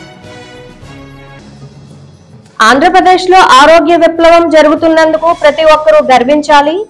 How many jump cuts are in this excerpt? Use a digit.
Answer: 1